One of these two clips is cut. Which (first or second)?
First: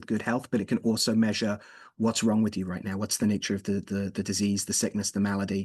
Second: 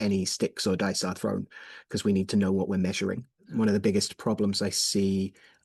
second